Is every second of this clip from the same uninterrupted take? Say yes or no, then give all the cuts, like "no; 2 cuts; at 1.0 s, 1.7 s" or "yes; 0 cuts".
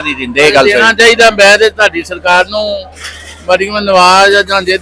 yes; 0 cuts